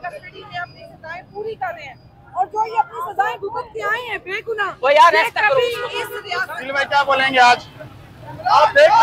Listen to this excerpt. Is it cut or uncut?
cut